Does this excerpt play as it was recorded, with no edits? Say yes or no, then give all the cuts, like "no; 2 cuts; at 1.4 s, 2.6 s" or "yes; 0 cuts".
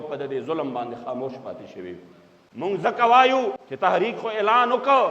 no; 1 cut; at 2.4 s